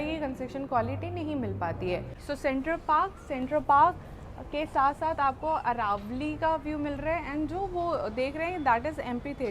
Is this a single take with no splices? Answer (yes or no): no